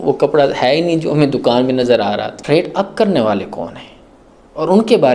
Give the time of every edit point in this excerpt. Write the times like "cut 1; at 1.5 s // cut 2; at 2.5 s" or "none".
cut 1; at 2.4 s